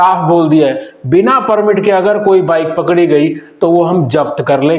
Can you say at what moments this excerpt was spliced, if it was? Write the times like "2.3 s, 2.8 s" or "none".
none